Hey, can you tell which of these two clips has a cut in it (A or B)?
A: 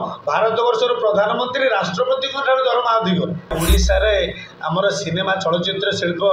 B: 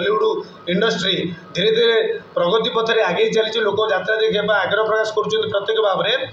A